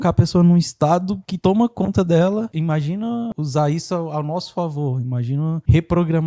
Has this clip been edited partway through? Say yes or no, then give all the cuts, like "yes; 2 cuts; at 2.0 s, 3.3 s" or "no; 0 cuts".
yes; 2 cuts; at 1.2 s, 3.3 s